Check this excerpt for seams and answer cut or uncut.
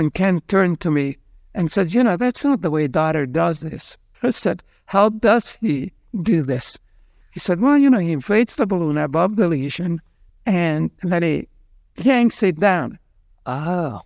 uncut